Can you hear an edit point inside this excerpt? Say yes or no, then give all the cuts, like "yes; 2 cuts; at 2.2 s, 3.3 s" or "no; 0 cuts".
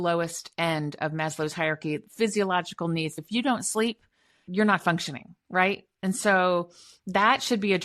yes; 2 cuts; at 3.1 s, 4.4 s